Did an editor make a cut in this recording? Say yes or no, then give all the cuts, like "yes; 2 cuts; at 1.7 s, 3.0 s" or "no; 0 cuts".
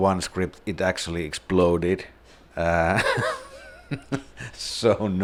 no; 0 cuts